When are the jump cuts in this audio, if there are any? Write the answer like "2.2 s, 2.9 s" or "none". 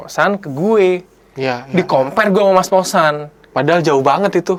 none